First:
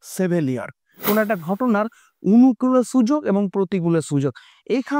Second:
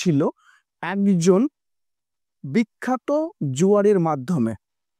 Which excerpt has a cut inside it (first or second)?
first